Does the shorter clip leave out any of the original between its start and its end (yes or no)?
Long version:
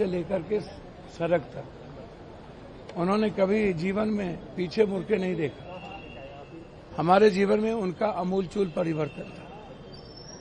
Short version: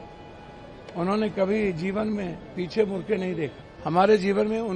yes